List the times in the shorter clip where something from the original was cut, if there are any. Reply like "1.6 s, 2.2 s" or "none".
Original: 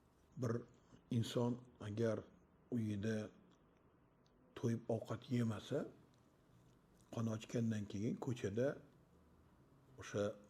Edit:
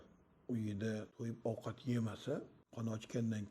1.2 s, 2.6 s